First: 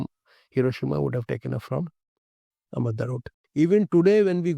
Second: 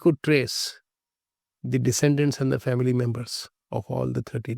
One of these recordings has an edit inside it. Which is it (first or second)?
first